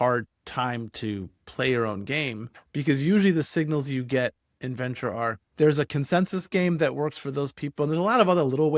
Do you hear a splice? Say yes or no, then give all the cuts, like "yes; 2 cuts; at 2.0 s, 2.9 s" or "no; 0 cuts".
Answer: no; 0 cuts